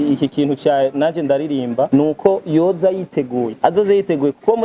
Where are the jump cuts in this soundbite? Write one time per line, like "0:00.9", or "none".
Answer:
0:01.9
0:03.5